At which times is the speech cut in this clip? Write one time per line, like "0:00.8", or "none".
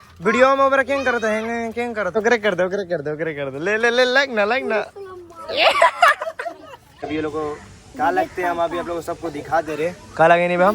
0:02.2
0:07.0